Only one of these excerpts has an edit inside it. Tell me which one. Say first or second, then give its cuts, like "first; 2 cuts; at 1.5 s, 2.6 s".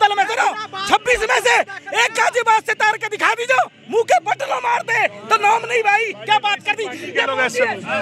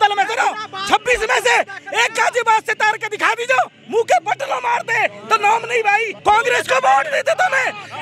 second; 1 cut; at 6.1 s